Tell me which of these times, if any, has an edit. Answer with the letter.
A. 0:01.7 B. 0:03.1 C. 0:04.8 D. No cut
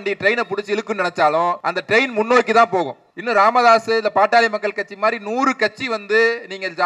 A